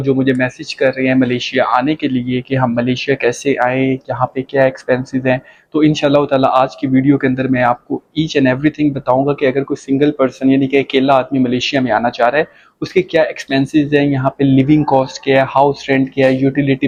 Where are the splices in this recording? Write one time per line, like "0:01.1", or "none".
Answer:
none